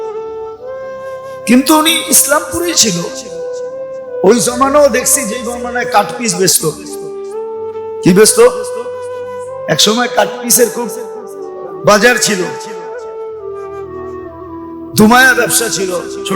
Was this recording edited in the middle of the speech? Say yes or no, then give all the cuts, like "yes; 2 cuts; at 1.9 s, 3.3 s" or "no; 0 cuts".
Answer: yes; 2 cuts; at 3.1 s, 4.2 s